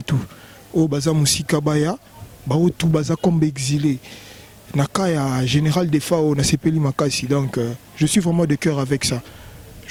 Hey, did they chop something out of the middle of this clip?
no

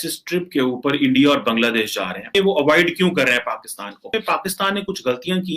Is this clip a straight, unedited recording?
no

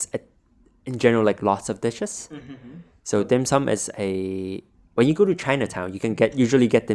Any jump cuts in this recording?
no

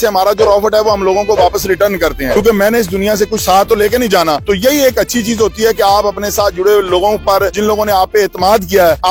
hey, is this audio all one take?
yes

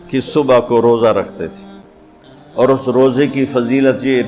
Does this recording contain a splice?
no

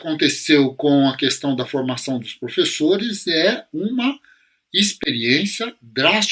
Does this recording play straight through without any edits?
yes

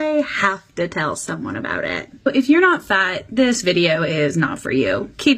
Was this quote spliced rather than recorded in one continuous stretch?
no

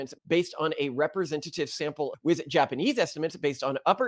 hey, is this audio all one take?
no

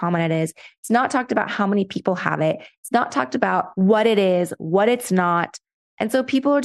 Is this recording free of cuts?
yes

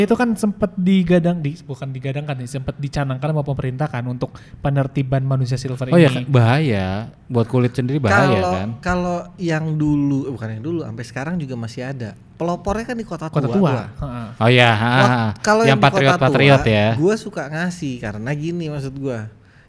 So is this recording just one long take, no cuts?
yes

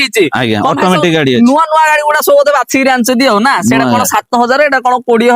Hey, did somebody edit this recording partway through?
no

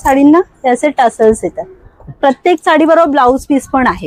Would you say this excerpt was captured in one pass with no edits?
yes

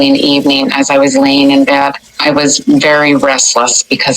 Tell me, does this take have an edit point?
yes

